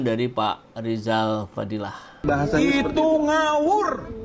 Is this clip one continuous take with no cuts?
no; 1 cut; at 2.2 s

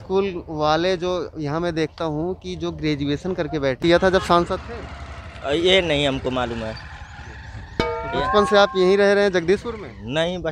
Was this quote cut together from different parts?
yes; 1 cut; at 3.8 s

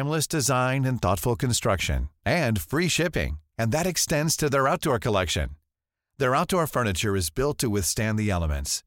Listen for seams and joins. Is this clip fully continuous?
yes; 0 cuts

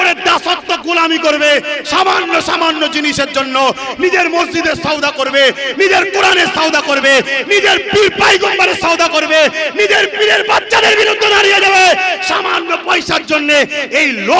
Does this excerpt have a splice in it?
no; 0 cuts

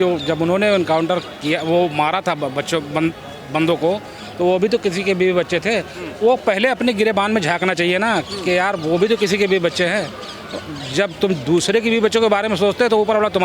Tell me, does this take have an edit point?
no; 0 cuts

